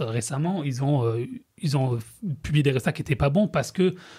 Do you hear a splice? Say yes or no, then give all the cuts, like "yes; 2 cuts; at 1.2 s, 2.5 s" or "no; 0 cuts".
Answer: no; 0 cuts